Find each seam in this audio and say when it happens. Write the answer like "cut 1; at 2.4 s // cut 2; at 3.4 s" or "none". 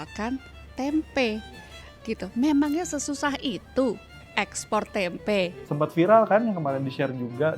cut 1; at 5.6 s